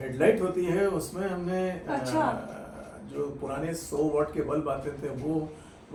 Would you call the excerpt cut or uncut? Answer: uncut